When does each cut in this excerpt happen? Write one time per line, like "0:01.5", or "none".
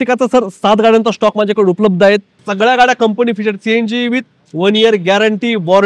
0:02.4